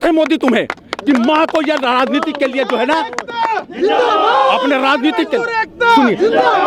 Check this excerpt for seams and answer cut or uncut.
uncut